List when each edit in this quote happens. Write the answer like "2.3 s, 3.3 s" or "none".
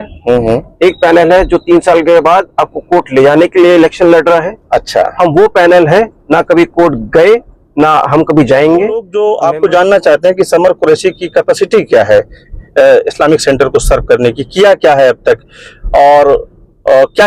9.1 s